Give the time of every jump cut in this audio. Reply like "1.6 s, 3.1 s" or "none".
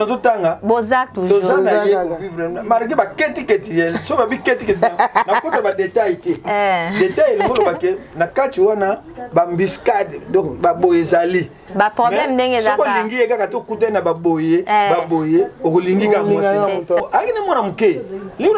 17.0 s